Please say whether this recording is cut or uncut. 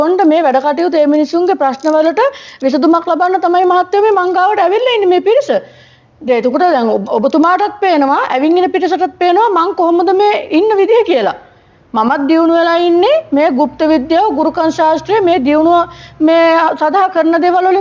uncut